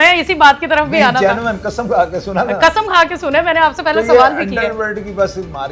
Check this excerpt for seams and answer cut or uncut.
uncut